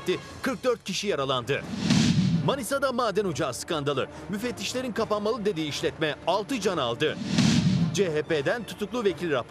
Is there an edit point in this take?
yes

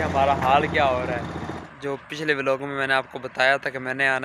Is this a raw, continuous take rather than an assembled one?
no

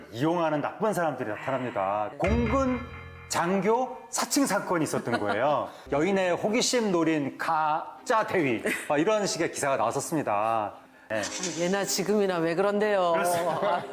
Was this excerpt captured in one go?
no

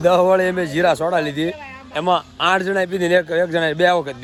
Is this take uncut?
yes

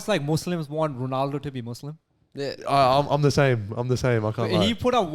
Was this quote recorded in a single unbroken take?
yes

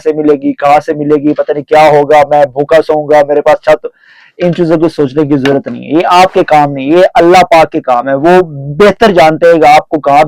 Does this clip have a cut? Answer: no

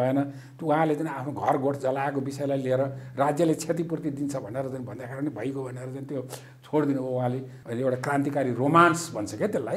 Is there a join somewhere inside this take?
yes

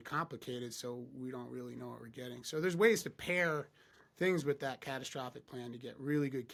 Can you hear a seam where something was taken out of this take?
no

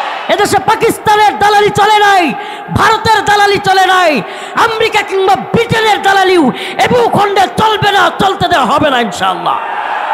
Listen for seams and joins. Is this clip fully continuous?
yes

